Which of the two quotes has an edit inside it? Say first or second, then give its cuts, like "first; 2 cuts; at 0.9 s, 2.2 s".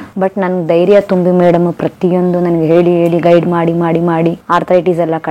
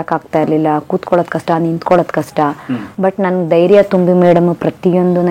first; 1 cut; at 4.4 s